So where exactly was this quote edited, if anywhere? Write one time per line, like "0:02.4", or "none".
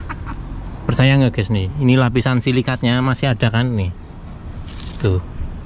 0:01.8